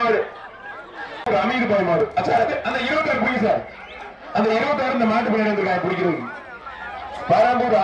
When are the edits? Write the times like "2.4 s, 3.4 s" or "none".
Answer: 1.2 s